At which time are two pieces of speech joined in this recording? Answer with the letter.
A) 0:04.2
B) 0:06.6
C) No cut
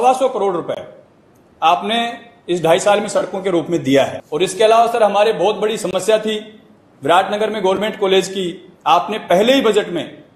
A